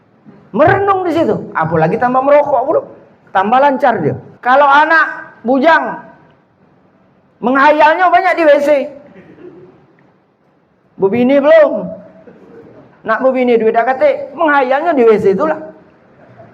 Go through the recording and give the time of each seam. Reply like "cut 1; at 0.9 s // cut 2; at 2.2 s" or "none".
cut 1; at 4.3 s